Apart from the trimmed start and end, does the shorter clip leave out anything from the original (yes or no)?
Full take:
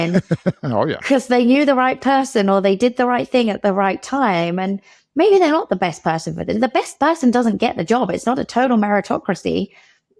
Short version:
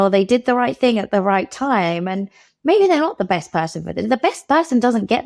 no